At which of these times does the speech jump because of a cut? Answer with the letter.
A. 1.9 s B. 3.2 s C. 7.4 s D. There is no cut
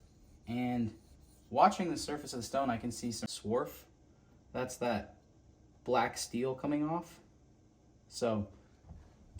B